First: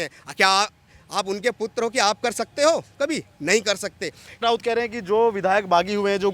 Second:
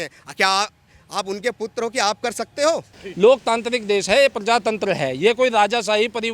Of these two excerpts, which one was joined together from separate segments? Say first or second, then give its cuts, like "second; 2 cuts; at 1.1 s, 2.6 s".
second; 1 cut; at 2.9 s